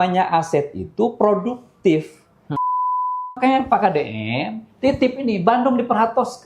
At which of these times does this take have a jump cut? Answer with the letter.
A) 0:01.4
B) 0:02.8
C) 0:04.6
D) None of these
B